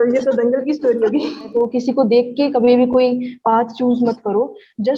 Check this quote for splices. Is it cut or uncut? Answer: cut